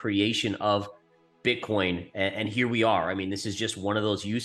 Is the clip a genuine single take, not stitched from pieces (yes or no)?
yes